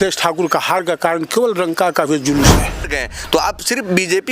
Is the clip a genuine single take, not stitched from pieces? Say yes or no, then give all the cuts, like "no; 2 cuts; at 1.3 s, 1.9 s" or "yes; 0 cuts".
no; 1 cut; at 2.8 s